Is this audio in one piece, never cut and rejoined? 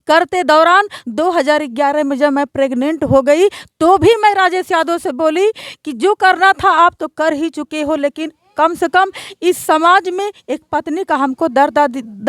yes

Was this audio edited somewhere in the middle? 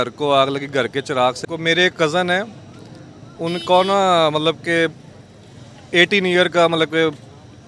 yes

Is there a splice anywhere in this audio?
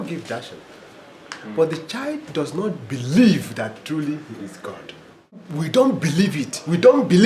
yes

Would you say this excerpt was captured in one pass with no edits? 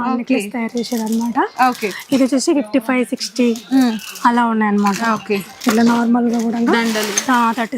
yes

